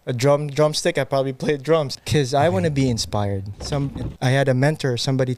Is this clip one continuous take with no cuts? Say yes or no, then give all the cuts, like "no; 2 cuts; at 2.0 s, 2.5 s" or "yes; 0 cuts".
no; 2 cuts; at 2.0 s, 3.7 s